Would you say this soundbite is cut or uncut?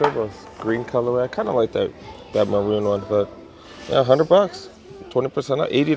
uncut